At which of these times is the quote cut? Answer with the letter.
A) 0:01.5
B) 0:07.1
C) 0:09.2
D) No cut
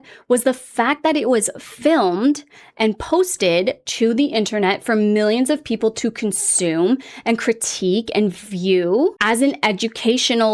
C